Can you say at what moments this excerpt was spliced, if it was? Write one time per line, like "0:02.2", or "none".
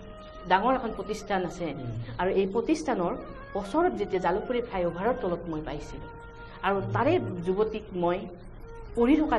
none